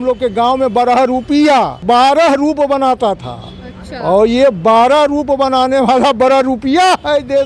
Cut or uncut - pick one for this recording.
cut